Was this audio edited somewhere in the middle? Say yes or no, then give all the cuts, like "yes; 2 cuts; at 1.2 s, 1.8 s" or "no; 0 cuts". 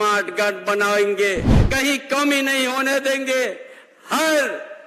yes; 1 cut; at 1.6 s